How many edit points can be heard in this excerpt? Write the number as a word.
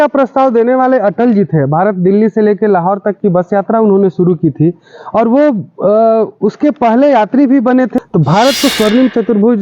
one